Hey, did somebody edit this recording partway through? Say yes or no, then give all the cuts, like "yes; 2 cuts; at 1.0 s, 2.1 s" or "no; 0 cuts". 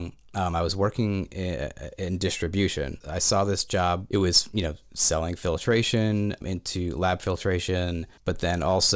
yes; 4 cuts; at 3.0 s, 4.0 s, 6.4 s, 8.1 s